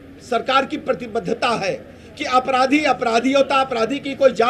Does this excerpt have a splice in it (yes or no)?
no